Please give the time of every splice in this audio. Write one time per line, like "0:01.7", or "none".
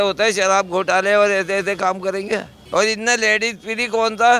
0:02.6